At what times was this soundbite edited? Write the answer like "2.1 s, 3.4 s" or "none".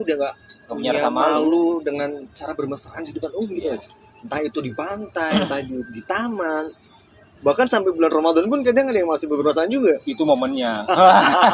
none